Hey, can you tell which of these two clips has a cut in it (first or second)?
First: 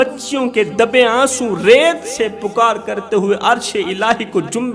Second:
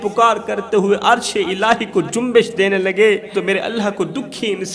second